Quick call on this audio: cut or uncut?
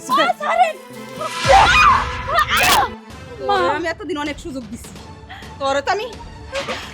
cut